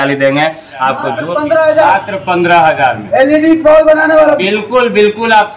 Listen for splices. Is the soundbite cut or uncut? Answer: cut